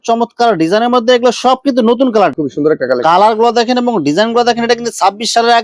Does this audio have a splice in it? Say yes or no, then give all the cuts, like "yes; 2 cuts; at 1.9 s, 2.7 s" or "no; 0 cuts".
yes; 1 cut; at 2.3 s